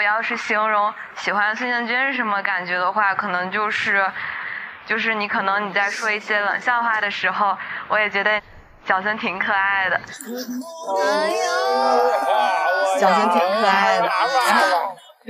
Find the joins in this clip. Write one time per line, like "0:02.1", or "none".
none